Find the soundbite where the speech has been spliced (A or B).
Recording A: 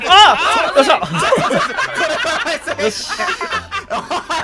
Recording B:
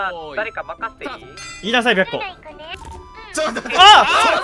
B